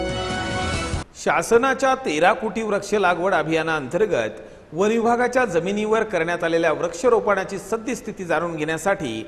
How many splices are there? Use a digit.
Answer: 1